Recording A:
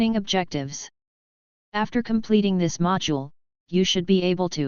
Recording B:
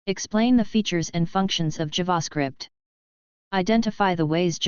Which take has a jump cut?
B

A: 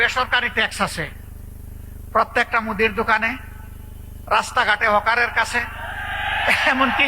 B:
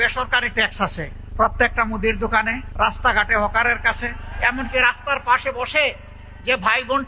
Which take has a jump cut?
B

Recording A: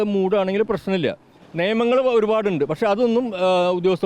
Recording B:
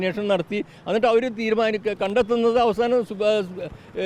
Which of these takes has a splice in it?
A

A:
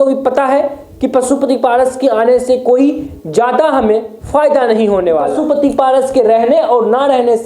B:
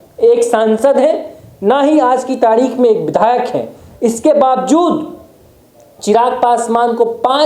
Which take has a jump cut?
A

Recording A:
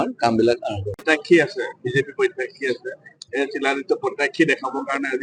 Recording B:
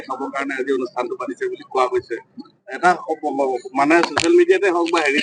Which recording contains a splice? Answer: A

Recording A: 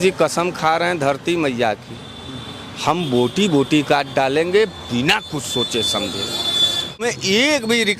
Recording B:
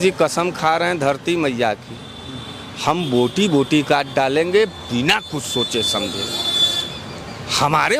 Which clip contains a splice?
A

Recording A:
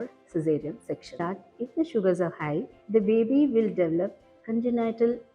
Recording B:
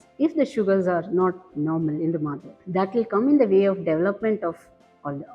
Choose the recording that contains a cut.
A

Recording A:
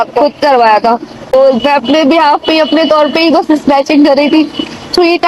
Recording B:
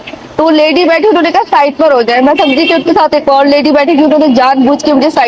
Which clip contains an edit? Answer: A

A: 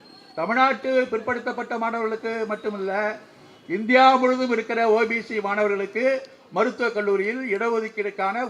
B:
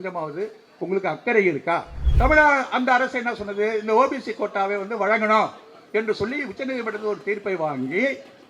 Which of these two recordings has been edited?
B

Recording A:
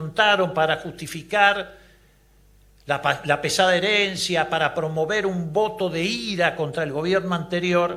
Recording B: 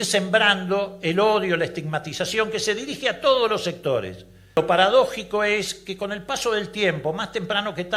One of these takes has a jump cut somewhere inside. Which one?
B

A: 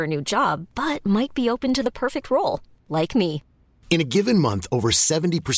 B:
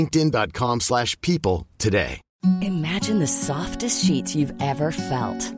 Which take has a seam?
B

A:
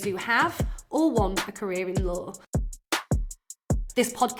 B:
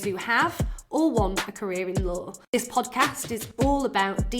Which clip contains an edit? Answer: B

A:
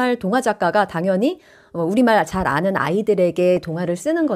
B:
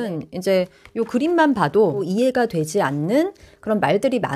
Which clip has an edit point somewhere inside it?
B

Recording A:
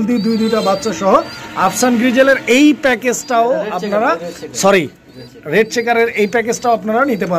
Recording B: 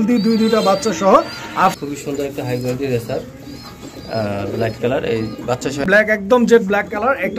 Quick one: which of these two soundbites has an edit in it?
B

